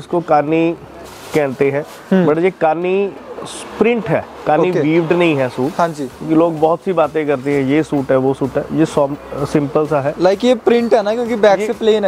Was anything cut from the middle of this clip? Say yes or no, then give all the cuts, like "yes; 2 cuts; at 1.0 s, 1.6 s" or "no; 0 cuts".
no; 0 cuts